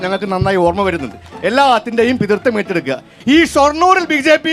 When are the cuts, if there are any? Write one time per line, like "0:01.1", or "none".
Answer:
0:03.1